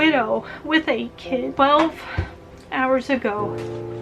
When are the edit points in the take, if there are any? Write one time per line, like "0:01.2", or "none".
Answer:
0:01.5